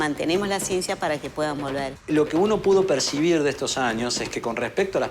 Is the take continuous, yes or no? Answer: no